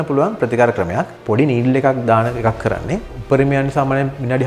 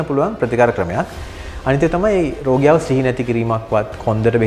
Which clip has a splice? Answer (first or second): first